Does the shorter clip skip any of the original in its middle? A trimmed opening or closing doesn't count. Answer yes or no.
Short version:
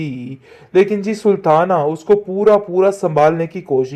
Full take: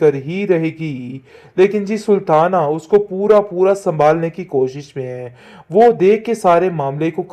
no